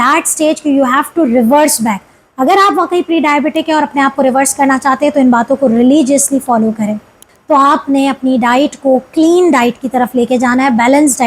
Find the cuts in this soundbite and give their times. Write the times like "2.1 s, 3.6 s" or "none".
7.3 s